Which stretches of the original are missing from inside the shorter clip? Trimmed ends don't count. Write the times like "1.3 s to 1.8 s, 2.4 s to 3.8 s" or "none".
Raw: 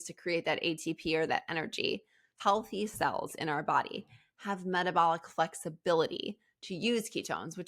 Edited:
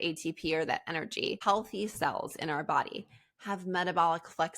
2.0 s to 2.4 s